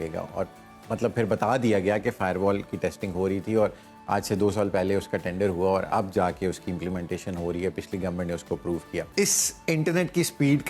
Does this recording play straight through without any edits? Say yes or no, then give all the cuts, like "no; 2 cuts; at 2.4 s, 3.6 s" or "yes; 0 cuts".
no; 1 cut; at 9.1 s